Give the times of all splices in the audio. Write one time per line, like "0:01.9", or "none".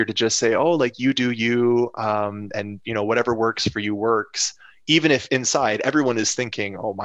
none